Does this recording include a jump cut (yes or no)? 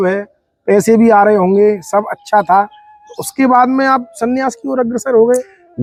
no